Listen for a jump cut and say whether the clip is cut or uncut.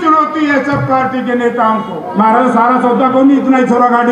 cut